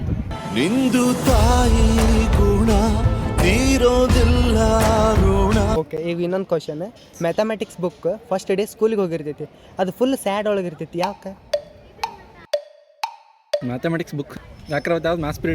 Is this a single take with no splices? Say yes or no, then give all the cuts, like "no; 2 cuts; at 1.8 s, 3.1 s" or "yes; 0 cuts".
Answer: no; 2 cuts; at 5.9 s, 14.3 s